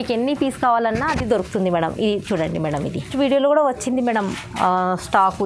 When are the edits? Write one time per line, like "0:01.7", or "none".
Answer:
0:03.1

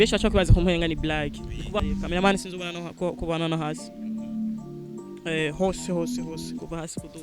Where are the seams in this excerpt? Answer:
0:01.8

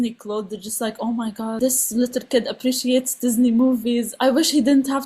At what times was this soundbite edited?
0:01.6

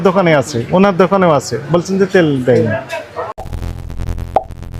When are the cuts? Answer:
none

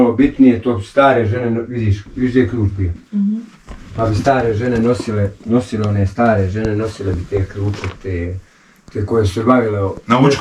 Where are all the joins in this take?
none

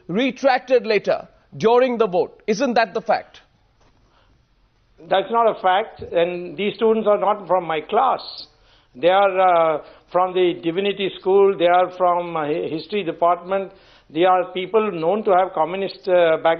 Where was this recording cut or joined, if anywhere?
0:02.4

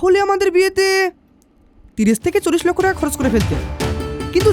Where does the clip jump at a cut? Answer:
none

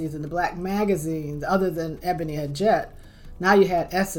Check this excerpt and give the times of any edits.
0:02.3

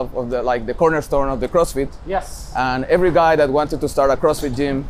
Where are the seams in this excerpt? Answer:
none

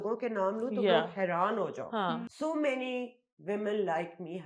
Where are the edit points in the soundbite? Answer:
0:02.3

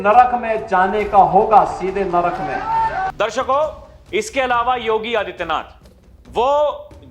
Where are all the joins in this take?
none

